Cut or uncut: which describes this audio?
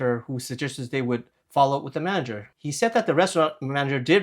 cut